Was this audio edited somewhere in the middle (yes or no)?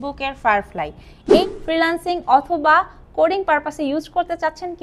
yes